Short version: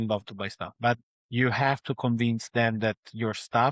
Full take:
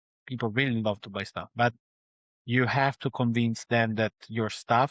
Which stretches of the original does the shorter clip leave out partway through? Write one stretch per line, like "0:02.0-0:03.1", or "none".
0:01.9-0:02.3